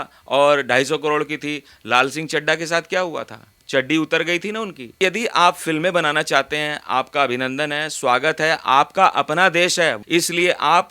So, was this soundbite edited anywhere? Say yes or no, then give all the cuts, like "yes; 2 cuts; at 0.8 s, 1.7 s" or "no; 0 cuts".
yes; 1 cut; at 4.8 s